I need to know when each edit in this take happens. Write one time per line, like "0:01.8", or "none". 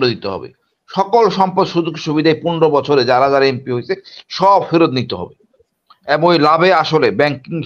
none